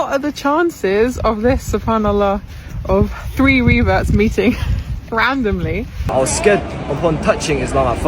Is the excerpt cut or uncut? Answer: cut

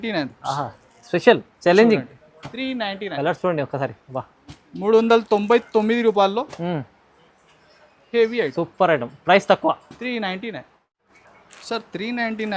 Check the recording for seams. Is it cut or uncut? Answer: uncut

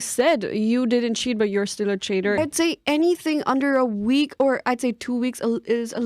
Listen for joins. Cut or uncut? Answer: cut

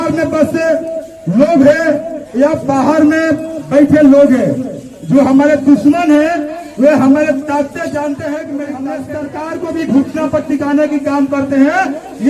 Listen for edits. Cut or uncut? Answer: cut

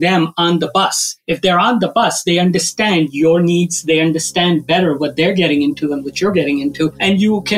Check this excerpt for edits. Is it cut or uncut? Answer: uncut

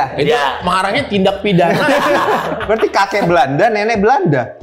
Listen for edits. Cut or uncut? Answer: cut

